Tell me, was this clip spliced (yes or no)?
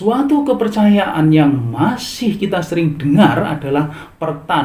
no